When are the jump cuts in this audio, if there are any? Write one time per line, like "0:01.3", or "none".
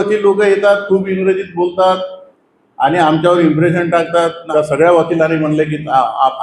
0:04.4

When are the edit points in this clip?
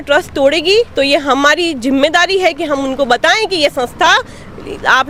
none

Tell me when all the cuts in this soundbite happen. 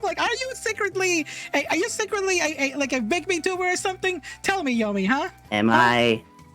0:05.4

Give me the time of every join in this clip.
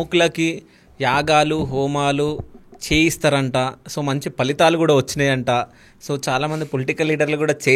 none

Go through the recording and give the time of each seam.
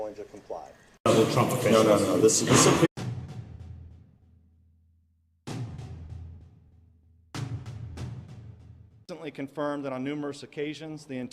none

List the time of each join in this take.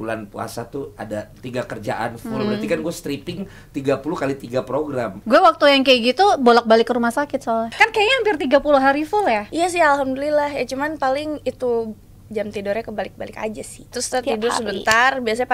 0:01.4
0:05.1
0:07.7
0:09.5
0:14.0

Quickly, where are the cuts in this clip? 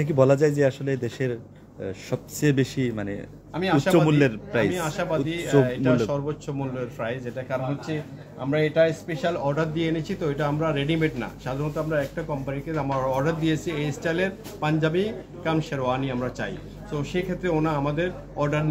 none

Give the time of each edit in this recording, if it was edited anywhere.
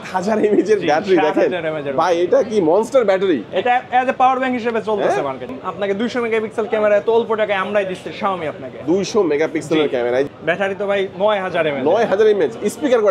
0:05.5
0:10.3

